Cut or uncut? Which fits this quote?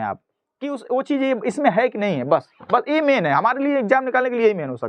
uncut